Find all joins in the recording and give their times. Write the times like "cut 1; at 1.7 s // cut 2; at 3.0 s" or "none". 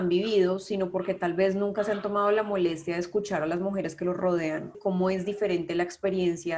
cut 1; at 4.8 s